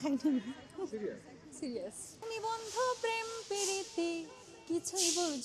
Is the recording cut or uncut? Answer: cut